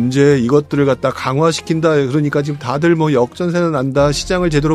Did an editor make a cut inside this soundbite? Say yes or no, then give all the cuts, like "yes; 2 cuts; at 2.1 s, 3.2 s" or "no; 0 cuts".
no; 0 cuts